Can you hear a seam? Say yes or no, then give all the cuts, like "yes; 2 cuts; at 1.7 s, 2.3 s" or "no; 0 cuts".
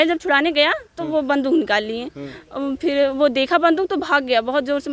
no; 0 cuts